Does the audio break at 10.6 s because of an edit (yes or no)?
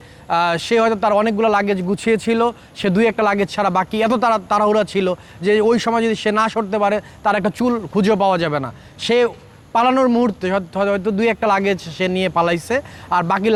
no